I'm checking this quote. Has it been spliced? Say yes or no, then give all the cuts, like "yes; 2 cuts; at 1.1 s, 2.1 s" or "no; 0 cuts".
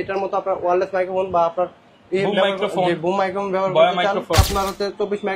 yes; 1 cut; at 4.5 s